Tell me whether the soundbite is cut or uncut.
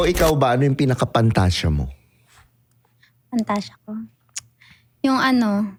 uncut